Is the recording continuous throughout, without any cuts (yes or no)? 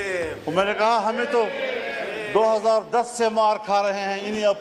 yes